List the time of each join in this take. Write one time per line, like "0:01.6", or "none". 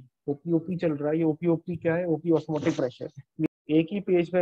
0:03.5